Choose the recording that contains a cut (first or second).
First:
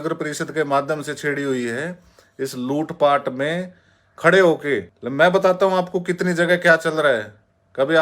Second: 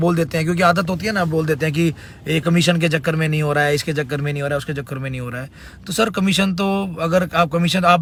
first